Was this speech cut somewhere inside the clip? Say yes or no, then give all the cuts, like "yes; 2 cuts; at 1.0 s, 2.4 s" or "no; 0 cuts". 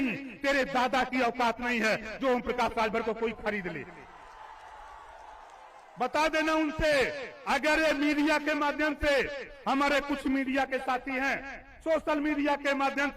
no; 0 cuts